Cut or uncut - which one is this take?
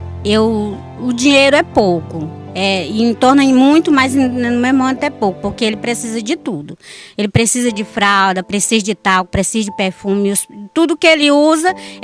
uncut